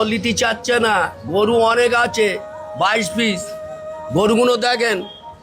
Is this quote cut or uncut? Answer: uncut